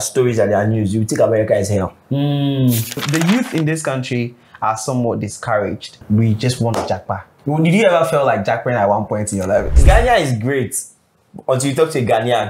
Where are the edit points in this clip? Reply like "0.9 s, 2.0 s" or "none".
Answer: 3.0 s, 6.0 s, 7.3 s, 9.8 s